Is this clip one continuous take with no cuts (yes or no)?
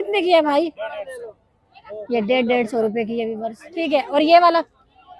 no